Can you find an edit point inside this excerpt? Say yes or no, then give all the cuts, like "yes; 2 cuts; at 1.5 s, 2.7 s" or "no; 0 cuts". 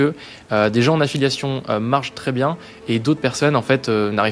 no; 0 cuts